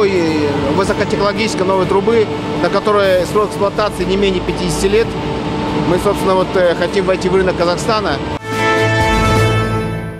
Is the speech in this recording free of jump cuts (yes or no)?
no